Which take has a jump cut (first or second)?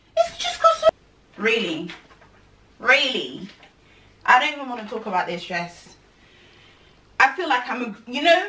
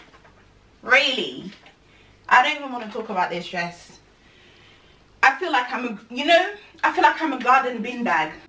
first